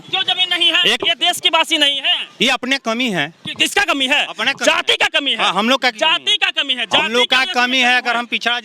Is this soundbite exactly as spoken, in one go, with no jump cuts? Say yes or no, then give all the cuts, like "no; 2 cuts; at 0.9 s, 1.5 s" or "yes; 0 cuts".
no; 1 cut; at 1.0 s